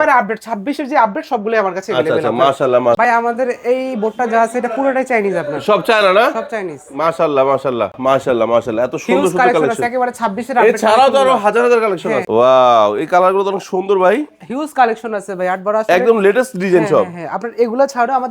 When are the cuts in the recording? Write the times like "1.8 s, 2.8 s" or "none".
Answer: 3.0 s, 8.0 s, 12.2 s